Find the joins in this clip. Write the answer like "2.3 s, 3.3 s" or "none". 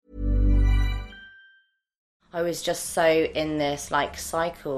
2.0 s

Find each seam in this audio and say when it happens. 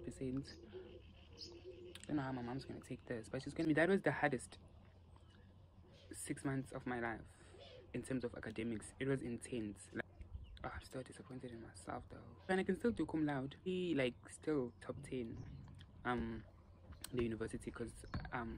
3.7 s, 10.0 s, 12.4 s, 13.7 s

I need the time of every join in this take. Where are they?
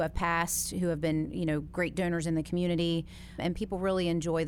3.4 s

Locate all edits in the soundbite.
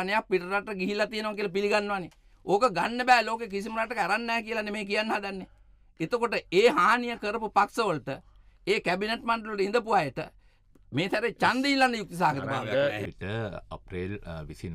13.1 s

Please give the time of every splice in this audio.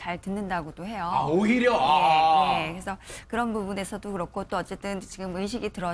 none

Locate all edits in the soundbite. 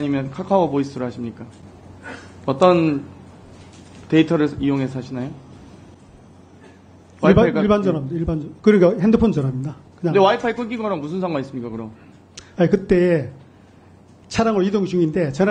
none

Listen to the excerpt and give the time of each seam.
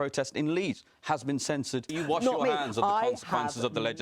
1.9 s

